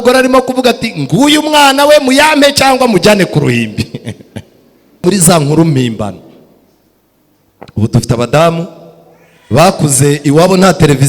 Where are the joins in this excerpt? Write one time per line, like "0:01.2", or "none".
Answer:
0:05.0